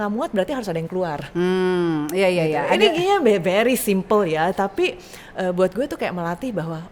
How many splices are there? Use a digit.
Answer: 0